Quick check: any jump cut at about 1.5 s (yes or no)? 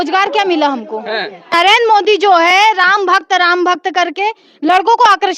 yes